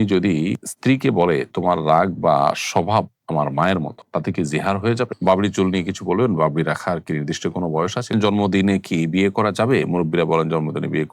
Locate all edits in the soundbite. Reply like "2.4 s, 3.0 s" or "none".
5.2 s, 8.1 s